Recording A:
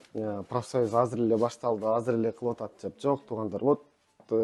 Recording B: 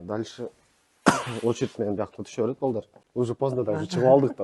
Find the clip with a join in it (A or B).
B